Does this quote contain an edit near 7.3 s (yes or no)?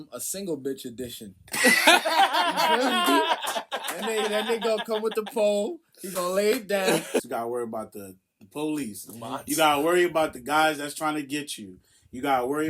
yes